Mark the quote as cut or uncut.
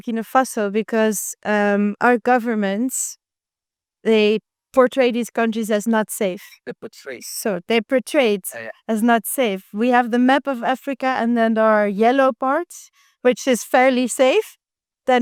uncut